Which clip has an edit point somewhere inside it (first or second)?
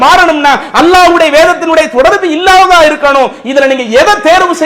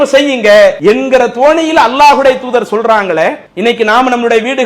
second